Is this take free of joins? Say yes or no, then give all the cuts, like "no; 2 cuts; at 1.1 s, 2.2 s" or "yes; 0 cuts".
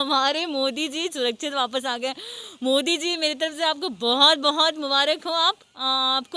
yes; 0 cuts